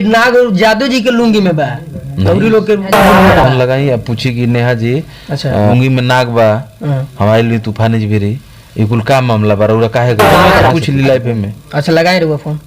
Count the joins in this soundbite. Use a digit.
3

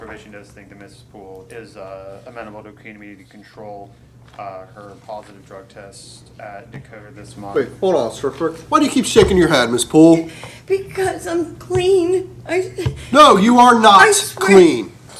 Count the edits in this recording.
1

